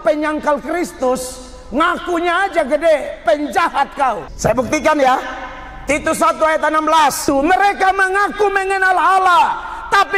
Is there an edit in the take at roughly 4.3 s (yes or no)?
yes